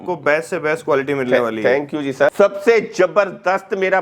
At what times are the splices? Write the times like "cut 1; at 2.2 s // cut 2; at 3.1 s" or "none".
cut 1; at 2.3 s